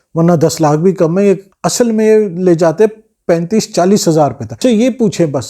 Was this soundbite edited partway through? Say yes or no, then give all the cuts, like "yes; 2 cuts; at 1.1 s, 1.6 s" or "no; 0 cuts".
yes; 2 cuts; at 1.5 s, 4.6 s